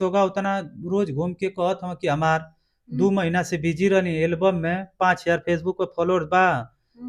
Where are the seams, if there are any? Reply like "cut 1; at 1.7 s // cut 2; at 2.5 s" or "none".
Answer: none